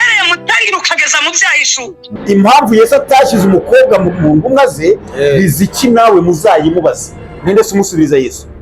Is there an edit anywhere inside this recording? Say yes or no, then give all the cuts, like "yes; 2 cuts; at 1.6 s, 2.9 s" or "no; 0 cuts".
yes; 1 cut; at 2.1 s